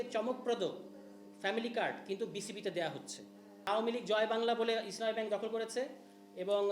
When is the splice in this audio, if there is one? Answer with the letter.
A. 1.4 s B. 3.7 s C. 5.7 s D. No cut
B